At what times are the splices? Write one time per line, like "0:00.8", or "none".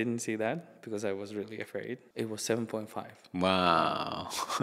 0:02.1